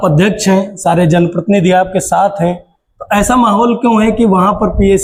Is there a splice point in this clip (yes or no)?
no